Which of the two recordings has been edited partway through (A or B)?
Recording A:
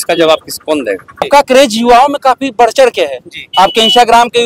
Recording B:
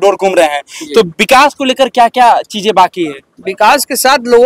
A